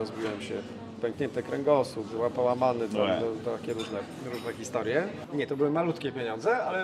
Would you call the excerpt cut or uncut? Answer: cut